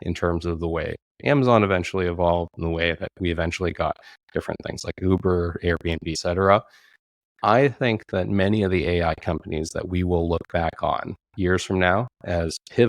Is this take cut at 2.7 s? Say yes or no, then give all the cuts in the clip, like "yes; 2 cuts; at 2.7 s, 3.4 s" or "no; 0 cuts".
no; 1 cut; at 6.1 s